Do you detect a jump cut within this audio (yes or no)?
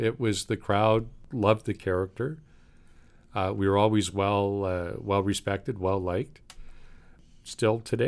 no